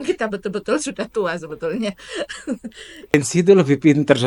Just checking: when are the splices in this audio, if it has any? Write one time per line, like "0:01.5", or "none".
0:03.1